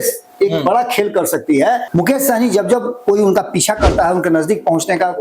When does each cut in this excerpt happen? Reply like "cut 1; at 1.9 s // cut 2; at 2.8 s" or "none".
cut 1; at 1.9 s